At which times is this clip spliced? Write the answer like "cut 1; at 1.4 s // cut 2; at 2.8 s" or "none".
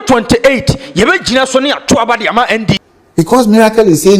cut 1; at 3.3 s